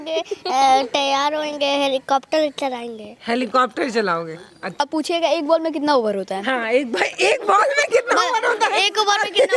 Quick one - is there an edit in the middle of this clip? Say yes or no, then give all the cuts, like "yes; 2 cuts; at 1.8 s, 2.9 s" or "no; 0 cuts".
yes; 1 cut; at 4.8 s